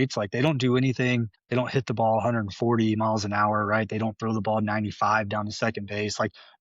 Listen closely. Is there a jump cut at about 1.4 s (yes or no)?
yes